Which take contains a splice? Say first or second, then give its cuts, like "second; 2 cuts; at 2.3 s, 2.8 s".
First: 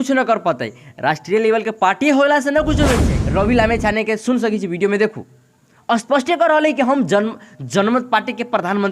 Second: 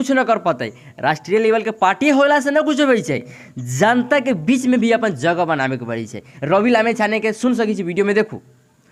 first; 1 cut; at 3.1 s